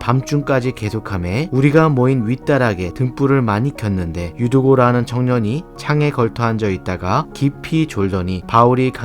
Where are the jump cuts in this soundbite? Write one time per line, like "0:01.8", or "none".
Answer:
0:04.3